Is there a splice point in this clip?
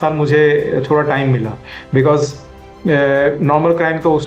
no; 0 cuts

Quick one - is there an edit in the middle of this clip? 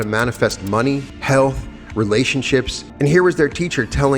yes; 2 cuts; at 1.1 s, 2.8 s

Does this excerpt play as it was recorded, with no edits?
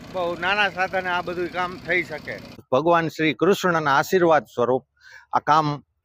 no; 1 cut; at 2.6 s

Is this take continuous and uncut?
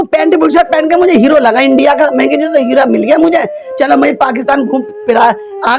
yes; 0 cuts

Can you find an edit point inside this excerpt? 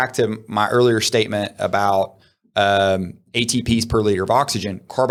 no; 0 cuts

